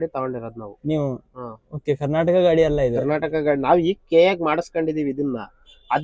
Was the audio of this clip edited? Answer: no; 0 cuts

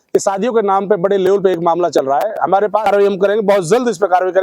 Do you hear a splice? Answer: yes; 1 cut; at 2.9 s

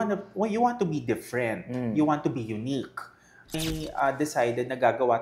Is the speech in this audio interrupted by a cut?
yes; 1 cut; at 3.6 s

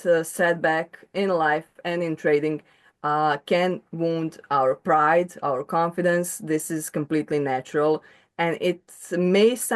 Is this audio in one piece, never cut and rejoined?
yes; 0 cuts

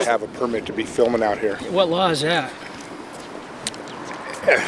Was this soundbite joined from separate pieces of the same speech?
no; 0 cuts

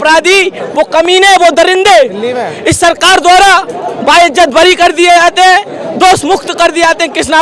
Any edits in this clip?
no; 0 cuts

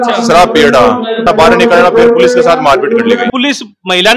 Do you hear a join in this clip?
yes; 2 cuts; at 1.2 s, 3.3 s

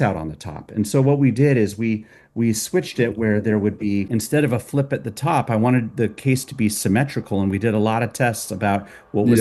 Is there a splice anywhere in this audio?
yes; 1 cut; at 4.1 s

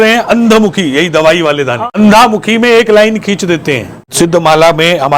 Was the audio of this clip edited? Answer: yes; 2 cuts; at 1.8 s, 4.0 s

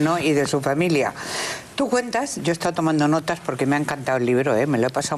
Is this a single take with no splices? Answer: yes; 0 cuts

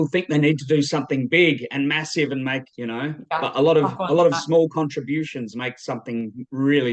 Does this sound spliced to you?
no; 0 cuts

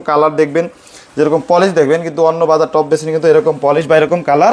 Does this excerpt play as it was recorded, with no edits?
yes; 0 cuts

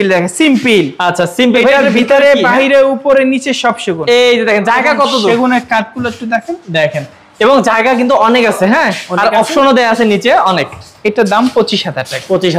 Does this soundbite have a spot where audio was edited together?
no; 0 cuts

